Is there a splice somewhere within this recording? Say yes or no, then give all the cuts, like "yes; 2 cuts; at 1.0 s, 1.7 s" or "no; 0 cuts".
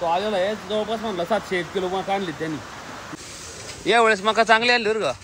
yes; 1 cut; at 3.1 s